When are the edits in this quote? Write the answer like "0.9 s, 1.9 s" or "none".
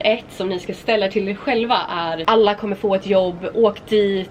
2.2 s